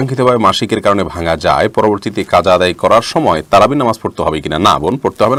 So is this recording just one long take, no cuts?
yes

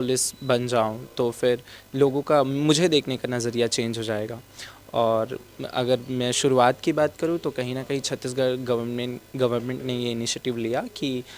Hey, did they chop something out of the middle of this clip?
no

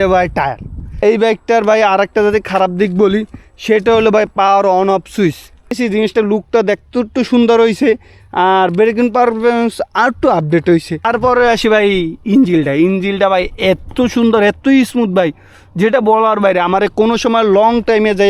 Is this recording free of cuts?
no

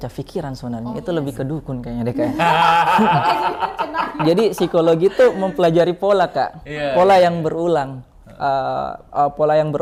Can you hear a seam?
no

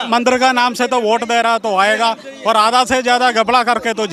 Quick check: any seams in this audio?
no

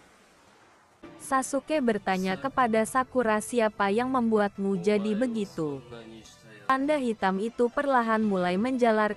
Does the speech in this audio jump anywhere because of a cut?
yes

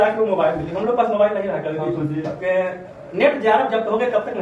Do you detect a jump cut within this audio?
no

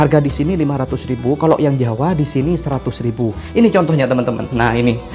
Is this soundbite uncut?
no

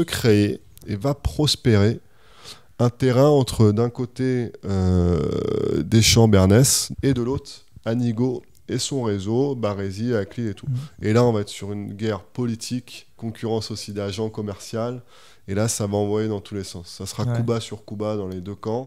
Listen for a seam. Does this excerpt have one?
yes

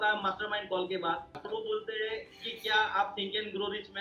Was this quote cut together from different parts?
yes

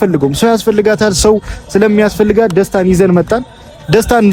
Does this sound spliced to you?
no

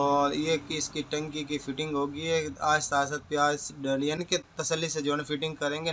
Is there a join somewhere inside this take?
no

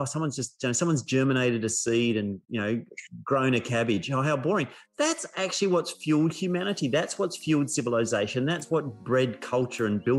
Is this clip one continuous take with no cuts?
yes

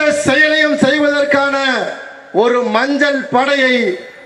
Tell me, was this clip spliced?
no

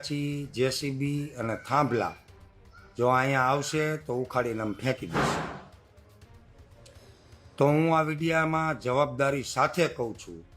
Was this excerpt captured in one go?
yes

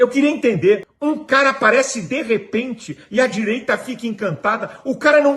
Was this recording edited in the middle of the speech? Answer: yes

